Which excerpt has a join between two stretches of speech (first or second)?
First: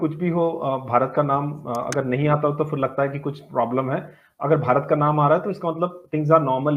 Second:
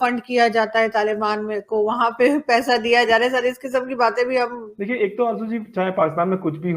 second